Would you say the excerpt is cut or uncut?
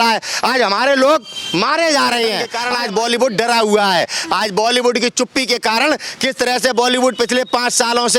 cut